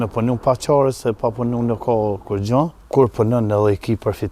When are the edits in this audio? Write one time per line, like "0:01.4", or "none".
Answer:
0:02.8